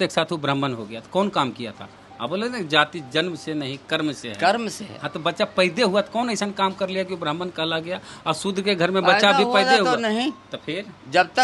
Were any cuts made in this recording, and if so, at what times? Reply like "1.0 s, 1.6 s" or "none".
none